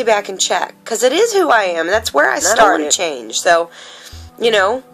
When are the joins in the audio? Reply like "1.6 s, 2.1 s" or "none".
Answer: 2.9 s